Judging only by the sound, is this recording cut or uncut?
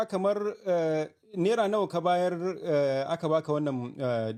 uncut